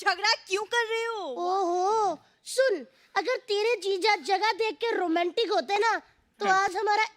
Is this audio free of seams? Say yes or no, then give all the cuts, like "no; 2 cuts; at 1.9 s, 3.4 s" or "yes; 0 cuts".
yes; 0 cuts